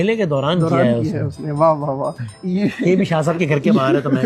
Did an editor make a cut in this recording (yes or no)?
no